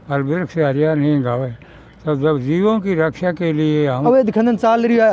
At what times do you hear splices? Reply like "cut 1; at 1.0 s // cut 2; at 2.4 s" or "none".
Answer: cut 1; at 4.0 s